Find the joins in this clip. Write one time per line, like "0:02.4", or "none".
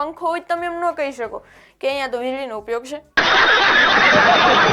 none